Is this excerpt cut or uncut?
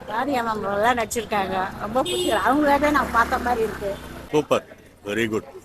cut